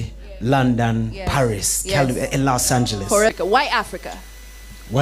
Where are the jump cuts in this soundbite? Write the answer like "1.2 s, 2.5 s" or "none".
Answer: 3.3 s